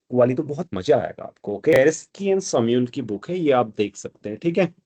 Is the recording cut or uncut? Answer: cut